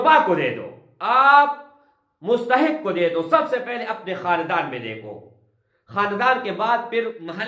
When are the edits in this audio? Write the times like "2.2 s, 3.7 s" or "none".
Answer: none